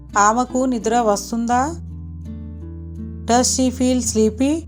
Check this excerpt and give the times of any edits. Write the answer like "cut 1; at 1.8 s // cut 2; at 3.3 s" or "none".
none